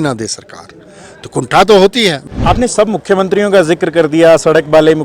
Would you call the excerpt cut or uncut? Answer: cut